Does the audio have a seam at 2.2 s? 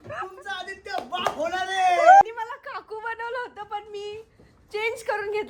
yes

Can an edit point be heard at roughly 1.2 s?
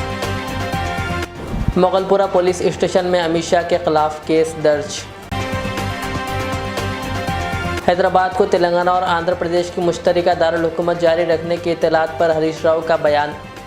yes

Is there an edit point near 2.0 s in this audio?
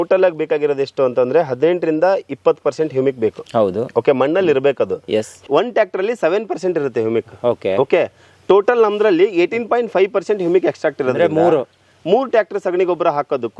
no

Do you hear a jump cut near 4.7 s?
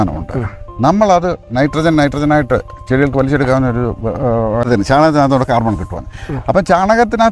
yes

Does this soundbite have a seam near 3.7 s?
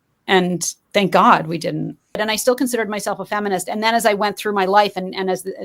no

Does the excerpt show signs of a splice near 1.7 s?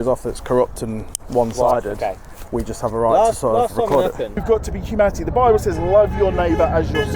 no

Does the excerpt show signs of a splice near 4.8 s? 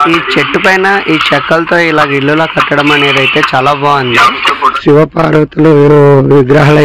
yes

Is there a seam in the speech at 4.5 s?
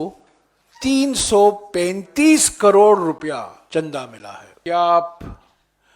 yes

